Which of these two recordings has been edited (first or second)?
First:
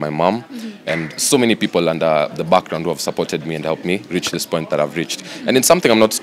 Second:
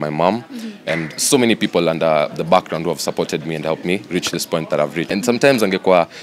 second